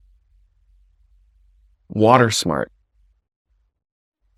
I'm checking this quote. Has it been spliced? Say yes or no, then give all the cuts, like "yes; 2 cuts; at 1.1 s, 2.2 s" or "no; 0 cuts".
no; 0 cuts